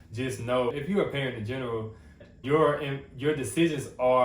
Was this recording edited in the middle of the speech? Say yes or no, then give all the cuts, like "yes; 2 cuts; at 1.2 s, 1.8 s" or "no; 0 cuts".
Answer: yes; 2 cuts; at 0.8 s, 2.2 s